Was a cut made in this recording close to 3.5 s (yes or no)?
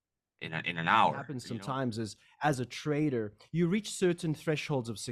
no